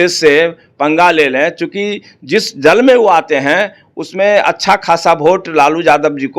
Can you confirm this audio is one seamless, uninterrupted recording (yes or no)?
yes